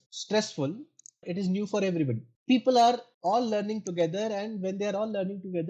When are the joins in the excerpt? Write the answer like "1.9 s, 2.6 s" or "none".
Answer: 1.3 s, 2.3 s

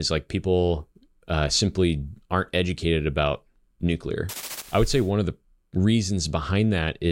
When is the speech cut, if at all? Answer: 4.5 s

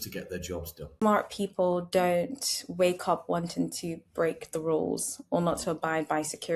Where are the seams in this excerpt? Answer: 0.9 s

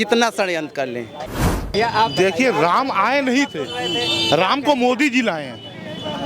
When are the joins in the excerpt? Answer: 1.4 s

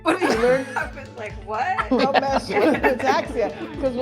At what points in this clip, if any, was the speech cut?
2.0 s

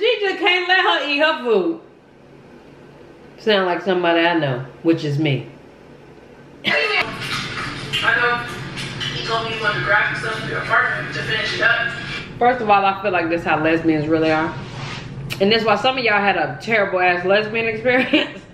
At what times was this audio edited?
7.0 s

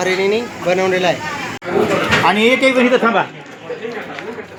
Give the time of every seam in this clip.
none

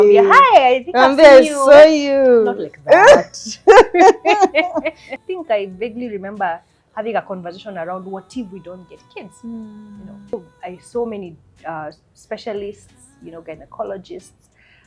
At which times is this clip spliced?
5.2 s, 10.3 s

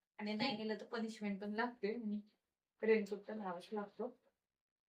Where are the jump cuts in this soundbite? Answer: none

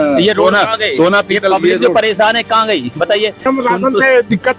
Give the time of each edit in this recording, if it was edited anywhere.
3.4 s

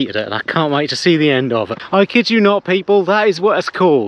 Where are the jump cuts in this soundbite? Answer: 1.8 s

